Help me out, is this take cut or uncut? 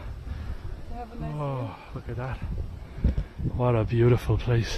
uncut